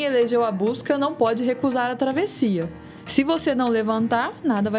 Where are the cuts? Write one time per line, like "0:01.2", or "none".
none